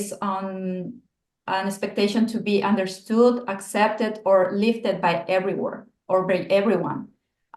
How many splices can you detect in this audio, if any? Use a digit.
0